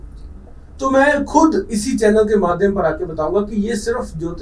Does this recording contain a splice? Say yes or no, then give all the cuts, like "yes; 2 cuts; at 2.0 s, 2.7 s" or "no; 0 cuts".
no; 0 cuts